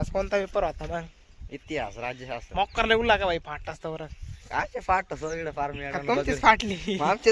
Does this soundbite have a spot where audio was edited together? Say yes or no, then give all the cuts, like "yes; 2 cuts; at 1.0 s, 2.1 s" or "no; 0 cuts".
no; 0 cuts